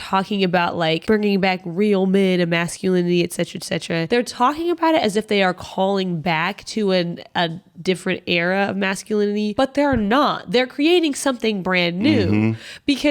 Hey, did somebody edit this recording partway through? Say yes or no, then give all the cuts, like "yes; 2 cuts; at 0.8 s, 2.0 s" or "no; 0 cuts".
yes; 3 cuts; at 1.0 s, 4.1 s, 9.5 s